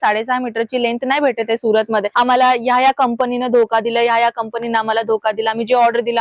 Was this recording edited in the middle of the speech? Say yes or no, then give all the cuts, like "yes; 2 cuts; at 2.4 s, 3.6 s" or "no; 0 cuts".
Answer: yes; 1 cut; at 2.1 s